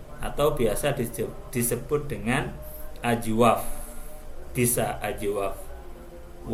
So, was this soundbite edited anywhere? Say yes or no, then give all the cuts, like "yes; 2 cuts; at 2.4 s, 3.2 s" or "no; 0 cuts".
no; 0 cuts